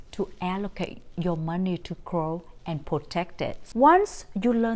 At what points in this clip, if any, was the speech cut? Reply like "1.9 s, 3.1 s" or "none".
3.6 s